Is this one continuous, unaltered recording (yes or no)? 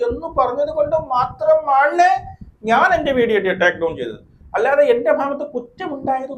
yes